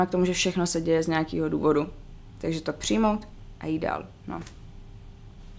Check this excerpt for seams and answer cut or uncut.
uncut